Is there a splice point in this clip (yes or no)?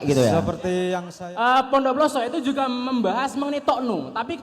yes